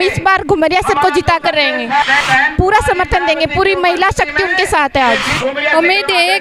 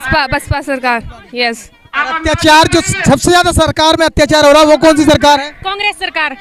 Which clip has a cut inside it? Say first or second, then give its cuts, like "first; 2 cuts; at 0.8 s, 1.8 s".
first; 2 cuts; at 2.2 s, 5.3 s